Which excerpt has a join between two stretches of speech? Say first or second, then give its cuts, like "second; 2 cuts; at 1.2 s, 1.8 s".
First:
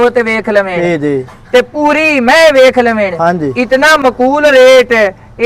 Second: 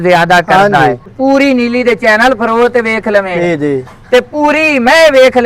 second; 1 cut; at 1.1 s